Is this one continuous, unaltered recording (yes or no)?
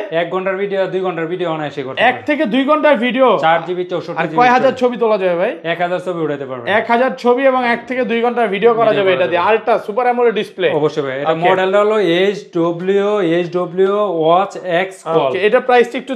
yes